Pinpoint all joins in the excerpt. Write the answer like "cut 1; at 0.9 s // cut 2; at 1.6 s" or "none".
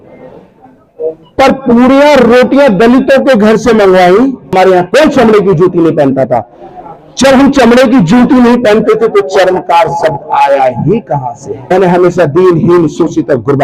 cut 1; at 4.5 s // cut 2; at 11.7 s